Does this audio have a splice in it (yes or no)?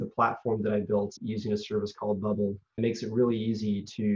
yes